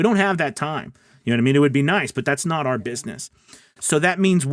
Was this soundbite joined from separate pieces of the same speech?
yes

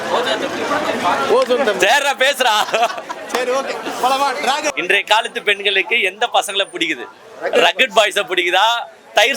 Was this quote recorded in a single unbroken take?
no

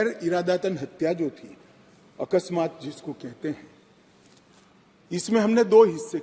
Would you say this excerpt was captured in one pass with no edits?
yes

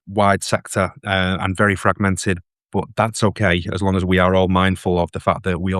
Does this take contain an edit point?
no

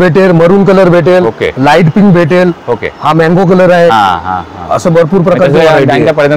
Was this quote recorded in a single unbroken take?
yes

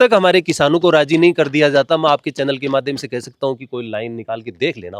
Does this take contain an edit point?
no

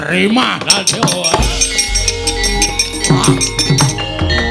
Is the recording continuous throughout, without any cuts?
yes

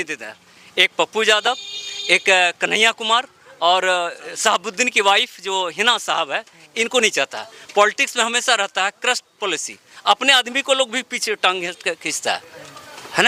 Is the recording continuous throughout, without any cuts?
yes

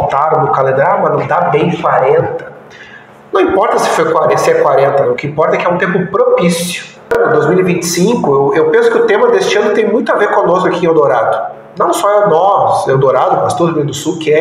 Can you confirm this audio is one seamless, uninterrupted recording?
no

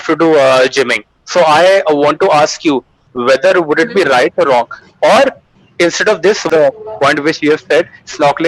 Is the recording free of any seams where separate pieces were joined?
no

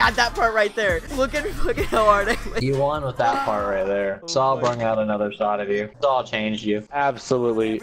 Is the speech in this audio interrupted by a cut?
yes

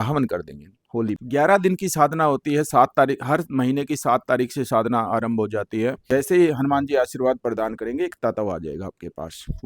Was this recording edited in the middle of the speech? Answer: yes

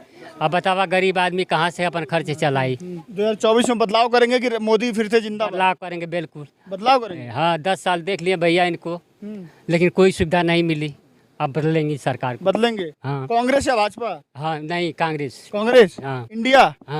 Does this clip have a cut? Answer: yes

